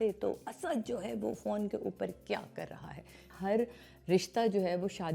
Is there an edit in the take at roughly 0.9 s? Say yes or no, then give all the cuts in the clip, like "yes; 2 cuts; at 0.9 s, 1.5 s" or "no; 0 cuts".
no; 1 cut; at 3.3 s